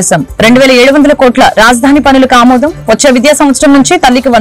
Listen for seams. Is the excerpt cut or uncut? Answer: uncut